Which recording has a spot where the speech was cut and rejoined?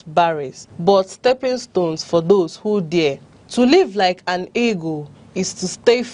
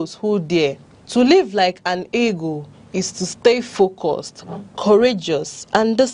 second; 1 cut; at 5.2 s

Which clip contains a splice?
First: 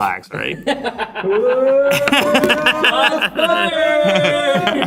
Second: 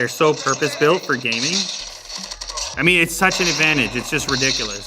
second; 1 cut; at 2.8 s

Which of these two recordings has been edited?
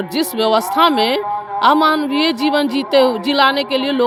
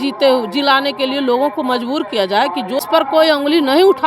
second; 1 cut; at 2.8 s

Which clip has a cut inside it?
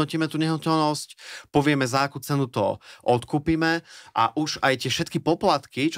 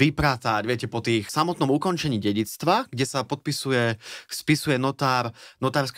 second; 1 cut; at 1.3 s

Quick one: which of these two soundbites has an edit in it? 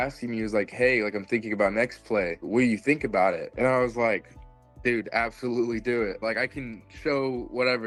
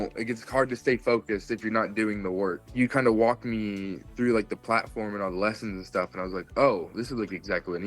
second; 1 cut; at 2.6 s

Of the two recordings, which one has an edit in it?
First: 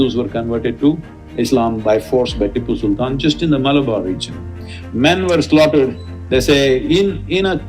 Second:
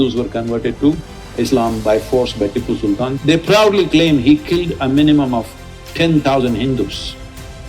second; 1 cut; at 3.1 s

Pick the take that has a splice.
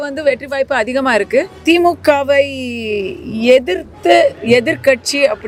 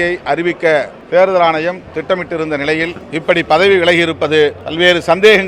second; 3 cuts; at 1.0 s, 3.0 s, 4.6 s

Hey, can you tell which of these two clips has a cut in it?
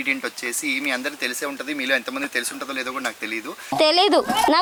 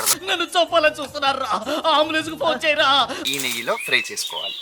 second; 1 cut; at 3.2 s

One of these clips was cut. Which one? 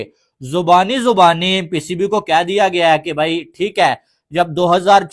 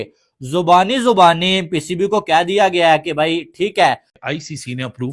second; 1 cut; at 4.2 s

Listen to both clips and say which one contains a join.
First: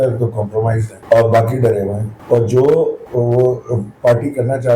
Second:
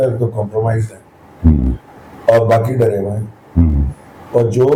first; 3 cuts; at 0.9 s, 2.1 s, 3.0 s

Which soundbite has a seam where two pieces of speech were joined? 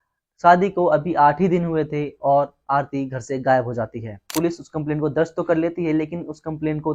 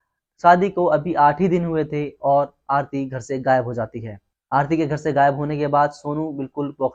first; 1 cut; at 4.3 s

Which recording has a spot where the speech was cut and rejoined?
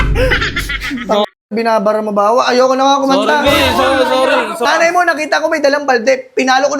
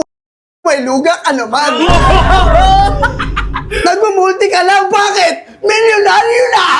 first; 1 cut; at 4.6 s

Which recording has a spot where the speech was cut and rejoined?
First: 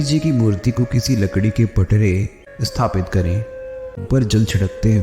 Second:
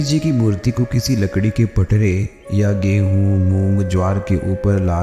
first; 2 cuts; at 2.4 s, 4.1 s

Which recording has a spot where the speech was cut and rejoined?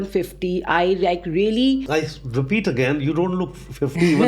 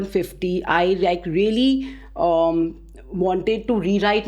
first; 1 cut; at 1.8 s

